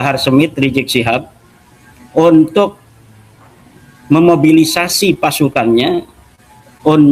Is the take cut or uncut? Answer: uncut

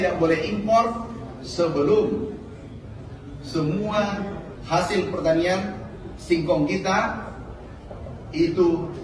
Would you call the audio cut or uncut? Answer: uncut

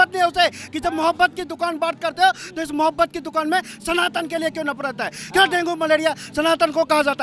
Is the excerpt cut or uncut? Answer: uncut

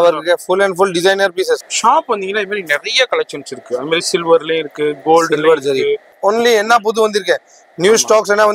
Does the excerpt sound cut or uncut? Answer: cut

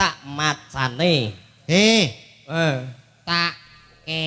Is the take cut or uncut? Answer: uncut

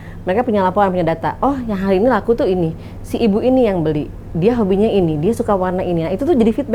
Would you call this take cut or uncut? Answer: uncut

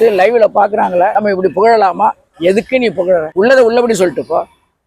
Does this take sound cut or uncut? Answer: cut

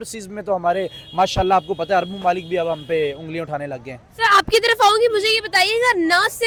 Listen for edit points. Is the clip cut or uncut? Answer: uncut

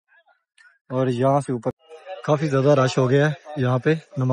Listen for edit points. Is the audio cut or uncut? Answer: uncut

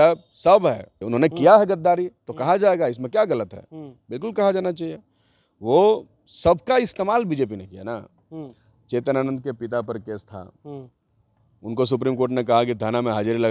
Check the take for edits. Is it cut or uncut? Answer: cut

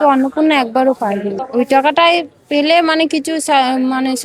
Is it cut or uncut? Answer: cut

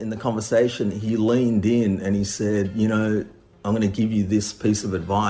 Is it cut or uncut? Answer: uncut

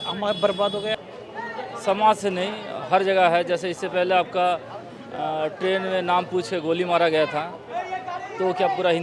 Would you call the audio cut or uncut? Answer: cut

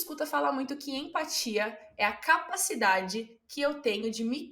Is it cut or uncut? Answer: uncut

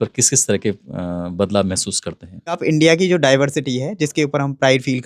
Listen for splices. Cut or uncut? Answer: cut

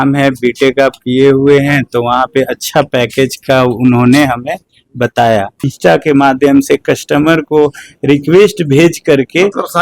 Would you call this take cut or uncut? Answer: cut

